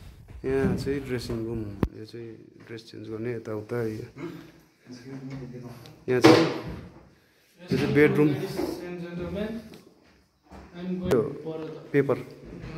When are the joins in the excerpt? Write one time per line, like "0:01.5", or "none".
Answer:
0:11.1

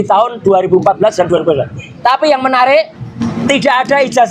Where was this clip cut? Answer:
0:03.2

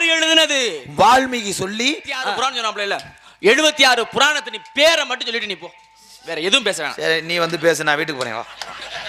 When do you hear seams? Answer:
0:02.3

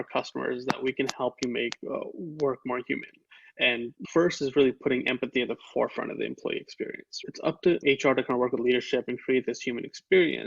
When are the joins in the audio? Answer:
0:03.9
0:07.1

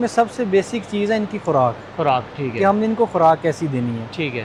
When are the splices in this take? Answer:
none

